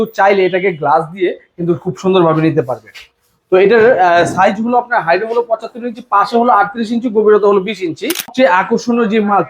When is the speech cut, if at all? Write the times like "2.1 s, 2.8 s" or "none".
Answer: 8.3 s

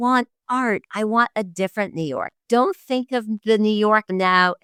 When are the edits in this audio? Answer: none

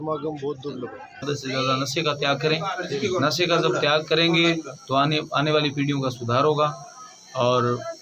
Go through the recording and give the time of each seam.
1.2 s

